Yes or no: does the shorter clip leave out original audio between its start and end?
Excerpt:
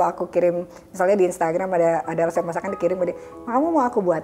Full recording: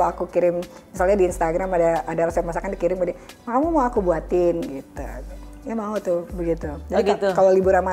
no